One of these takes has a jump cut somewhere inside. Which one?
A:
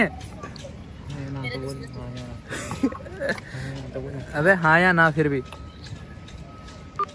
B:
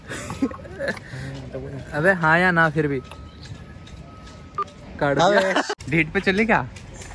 B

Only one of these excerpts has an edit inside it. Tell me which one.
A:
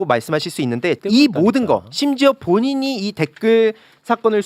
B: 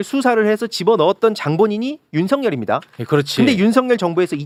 A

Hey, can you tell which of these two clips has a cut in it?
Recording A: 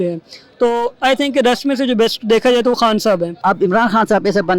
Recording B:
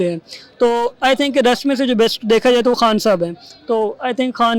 A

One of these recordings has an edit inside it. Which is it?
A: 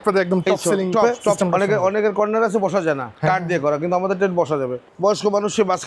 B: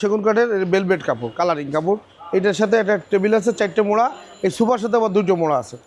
A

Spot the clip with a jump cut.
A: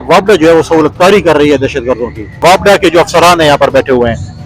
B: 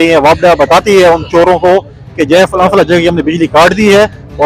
A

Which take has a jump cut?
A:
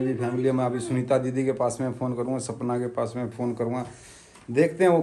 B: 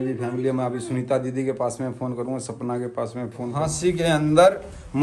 B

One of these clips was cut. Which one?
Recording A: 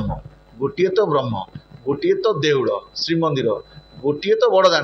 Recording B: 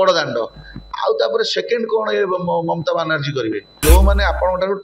B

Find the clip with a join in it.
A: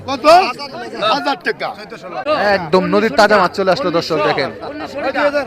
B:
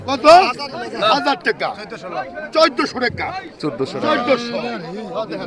A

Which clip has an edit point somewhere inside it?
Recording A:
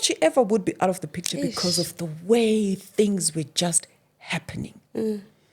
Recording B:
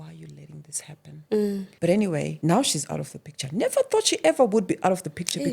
B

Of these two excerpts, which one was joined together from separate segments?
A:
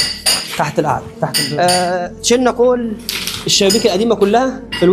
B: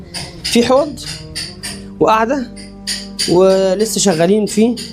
A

